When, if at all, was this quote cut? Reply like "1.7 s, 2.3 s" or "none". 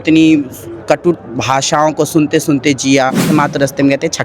3.3 s